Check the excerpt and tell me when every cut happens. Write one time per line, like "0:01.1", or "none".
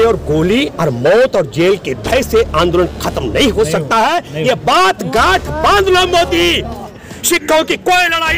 0:06.8